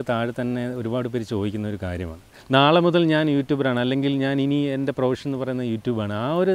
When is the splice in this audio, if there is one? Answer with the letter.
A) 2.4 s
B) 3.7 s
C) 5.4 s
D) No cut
A